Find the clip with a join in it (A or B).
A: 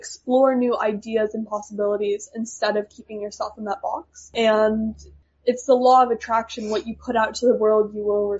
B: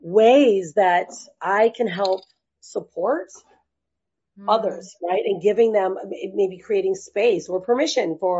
A